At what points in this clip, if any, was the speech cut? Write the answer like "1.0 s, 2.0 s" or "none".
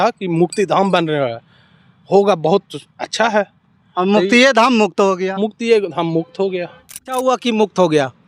7.2 s

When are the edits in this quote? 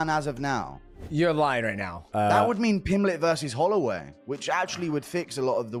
none

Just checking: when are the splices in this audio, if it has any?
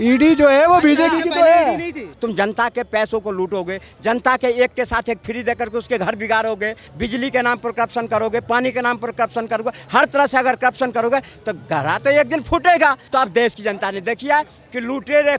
2.1 s, 6.9 s, 13.0 s

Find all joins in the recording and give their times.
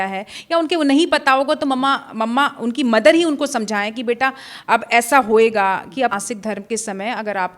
6.1 s

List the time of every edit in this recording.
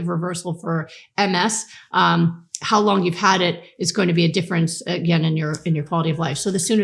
none

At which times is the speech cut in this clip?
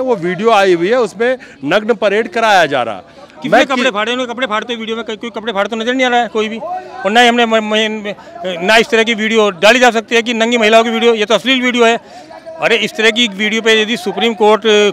none

